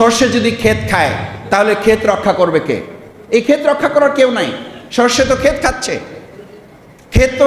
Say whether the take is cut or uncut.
uncut